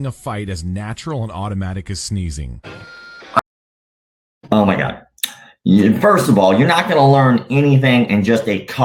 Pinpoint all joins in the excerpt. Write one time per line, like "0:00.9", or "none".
none

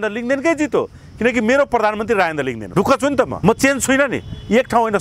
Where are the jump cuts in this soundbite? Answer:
0:02.6
0:03.3

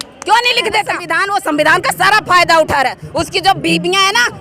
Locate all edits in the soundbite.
0:01.1

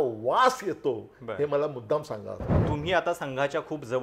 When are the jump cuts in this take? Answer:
0:02.6

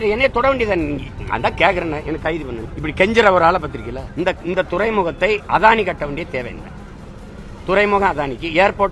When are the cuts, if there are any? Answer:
0:02.7
0:04.0

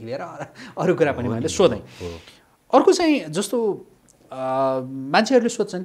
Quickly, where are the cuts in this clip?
none

